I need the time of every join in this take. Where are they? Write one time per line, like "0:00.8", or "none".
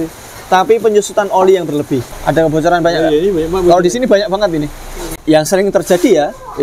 0:02.1
0:05.2